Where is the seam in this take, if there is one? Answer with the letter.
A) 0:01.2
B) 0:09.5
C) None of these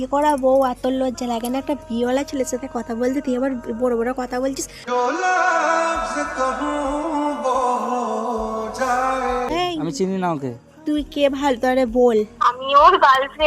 B